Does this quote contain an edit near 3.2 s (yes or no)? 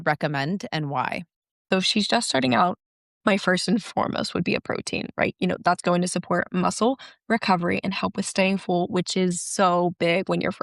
no